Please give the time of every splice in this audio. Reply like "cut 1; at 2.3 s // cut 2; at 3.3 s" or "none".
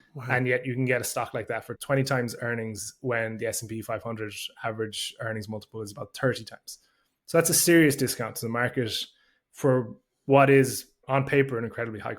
cut 1; at 11.0 s